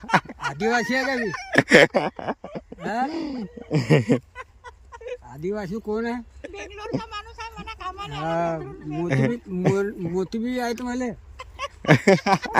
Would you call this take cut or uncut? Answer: uncut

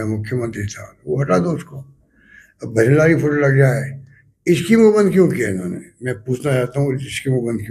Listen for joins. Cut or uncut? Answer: uncut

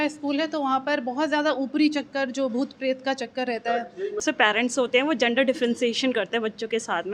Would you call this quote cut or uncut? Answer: cut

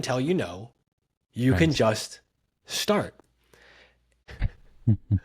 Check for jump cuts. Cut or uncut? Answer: cut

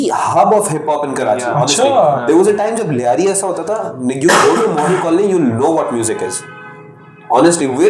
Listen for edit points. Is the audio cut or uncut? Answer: uncut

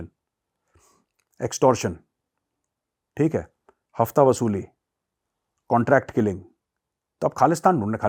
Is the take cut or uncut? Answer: uncut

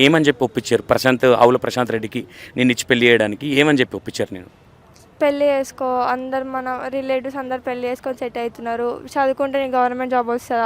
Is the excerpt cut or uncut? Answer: uncut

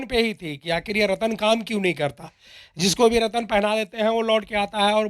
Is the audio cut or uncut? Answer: uncut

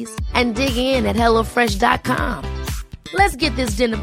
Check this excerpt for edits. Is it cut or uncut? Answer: uncut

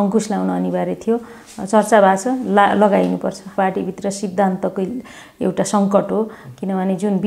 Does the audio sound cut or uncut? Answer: cut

